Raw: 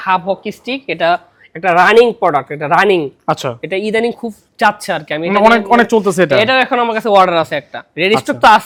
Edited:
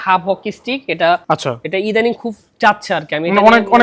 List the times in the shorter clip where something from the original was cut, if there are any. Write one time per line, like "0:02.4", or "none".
0:01.2